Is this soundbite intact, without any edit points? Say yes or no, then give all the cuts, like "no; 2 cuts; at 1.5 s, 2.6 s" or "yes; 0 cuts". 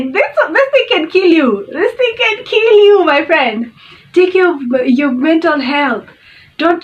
yes; 0 cuts